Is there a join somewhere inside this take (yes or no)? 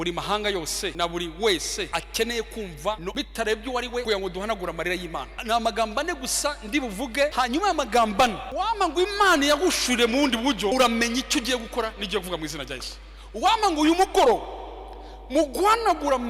yes